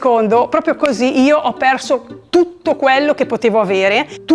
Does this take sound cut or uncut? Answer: uncut